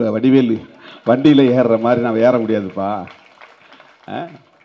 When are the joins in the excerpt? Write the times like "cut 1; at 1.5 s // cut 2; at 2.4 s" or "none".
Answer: none